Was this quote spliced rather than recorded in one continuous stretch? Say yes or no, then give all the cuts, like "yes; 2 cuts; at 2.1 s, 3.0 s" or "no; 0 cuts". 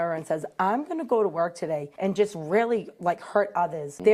no; 0 cuts